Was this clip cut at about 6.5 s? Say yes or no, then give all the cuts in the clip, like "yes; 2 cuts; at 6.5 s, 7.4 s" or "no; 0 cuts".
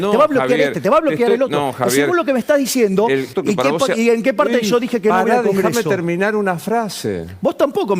no; 1 cut; at 3.3 s